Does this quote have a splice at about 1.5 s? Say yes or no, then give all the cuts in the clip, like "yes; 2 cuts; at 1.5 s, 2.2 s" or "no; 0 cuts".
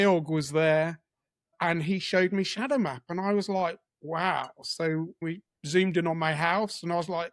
yes; 2 cuts; at 1.5 s, 5.2 s